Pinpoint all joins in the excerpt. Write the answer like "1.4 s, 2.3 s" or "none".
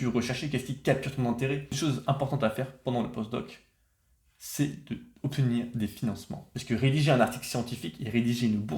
1.8 s, 6.4 s